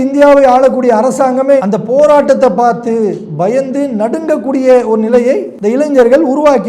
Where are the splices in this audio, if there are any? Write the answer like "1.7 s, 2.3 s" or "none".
5.5 s